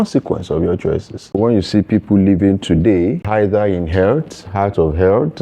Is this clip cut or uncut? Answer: cut